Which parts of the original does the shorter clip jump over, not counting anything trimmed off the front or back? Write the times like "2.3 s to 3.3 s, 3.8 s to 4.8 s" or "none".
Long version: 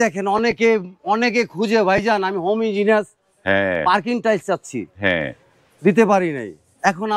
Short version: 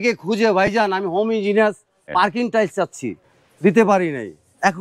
3.4 s to 3.8 s, 4.9 s to 5.4 s